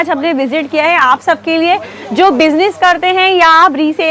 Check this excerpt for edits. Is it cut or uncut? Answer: uncut